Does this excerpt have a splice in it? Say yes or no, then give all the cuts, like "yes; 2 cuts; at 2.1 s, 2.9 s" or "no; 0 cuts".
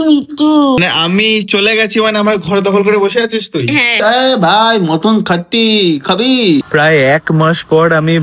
yes; 2 cuts; at 0.8 s, 3.9 s